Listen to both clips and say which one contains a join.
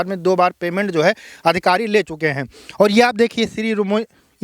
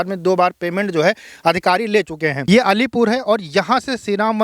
second; 1 cut; at 2.4 s

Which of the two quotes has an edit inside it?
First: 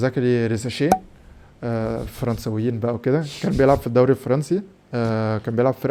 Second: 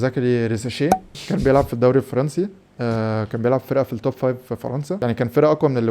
second; 2 cuts; at 1.2 s, 5.0 s

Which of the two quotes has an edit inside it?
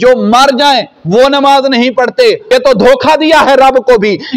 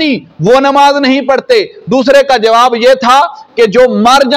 first; 1 cut; at 2.4 s

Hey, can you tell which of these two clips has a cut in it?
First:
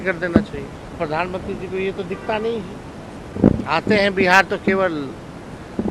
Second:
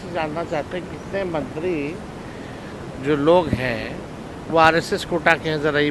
first; 2 cuts; at 1.0 s, 3.2 s

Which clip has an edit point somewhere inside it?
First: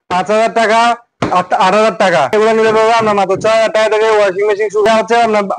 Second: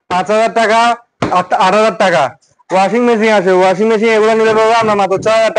first; 2 cuts; at 2.3 s, 4.9 s

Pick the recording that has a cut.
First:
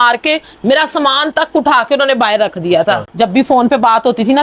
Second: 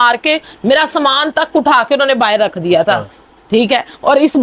first; 1 cut; at 3.1 s

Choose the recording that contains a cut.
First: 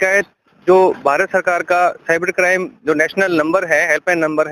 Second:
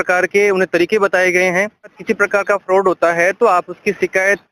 second; 1 cut; at 2.0 s

